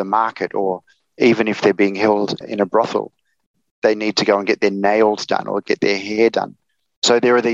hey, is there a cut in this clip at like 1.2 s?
yes; 2 cuts; at 1.2 s, 2.5 s

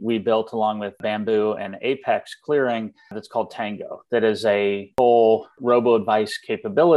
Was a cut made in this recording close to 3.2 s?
yes; 4 cuts; at 1.0 s, 3.2 s, 4.9 s, 5.5 s

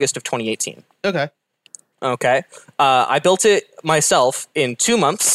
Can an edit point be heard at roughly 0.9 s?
no; 0 cuts

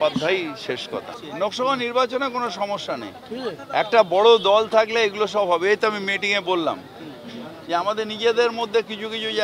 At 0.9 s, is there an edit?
yes; 1 cut; at 0.9 s

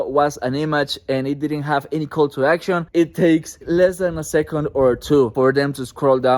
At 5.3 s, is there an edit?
yes; 3 cuts; at 2.9 s, 3.6 s, 5.3 s

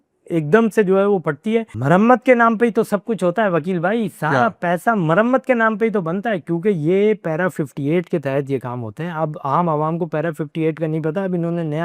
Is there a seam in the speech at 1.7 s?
yes; 1 cut; at 1.7 s

